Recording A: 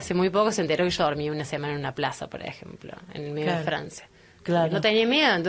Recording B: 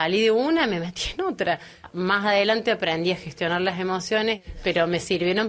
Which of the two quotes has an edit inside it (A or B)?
B